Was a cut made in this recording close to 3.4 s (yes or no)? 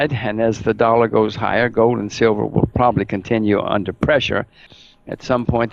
no